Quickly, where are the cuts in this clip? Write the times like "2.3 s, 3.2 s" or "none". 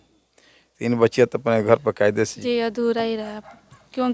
2.4 s